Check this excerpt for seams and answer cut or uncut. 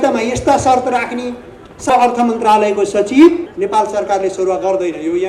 cut